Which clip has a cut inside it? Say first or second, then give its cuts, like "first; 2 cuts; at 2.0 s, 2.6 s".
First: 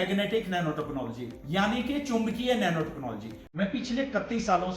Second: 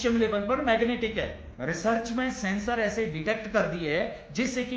second; 1 cut; at 1.5 s